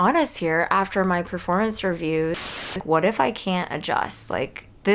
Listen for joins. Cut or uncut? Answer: cut